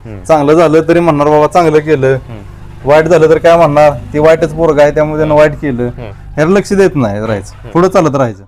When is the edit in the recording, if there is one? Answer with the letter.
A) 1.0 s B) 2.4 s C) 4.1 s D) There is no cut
D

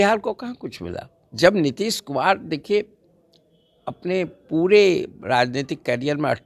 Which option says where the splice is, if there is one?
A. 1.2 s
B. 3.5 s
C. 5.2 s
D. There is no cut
A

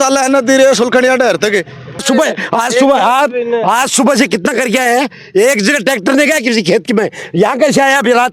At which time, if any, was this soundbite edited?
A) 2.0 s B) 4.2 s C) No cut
A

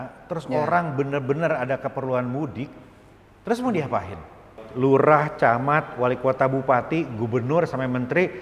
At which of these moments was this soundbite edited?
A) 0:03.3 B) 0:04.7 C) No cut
B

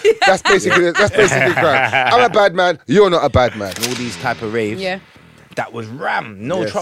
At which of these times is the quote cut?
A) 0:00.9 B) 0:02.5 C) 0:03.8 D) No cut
C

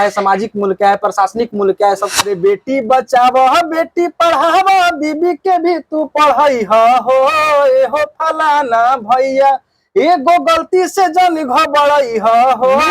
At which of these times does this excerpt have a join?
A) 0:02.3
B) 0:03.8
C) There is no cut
A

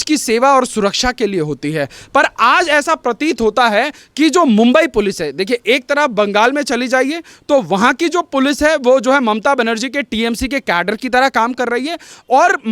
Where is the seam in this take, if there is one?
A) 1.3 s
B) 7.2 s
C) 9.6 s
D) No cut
D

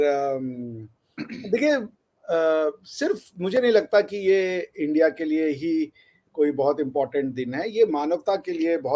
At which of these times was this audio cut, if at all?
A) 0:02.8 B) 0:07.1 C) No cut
C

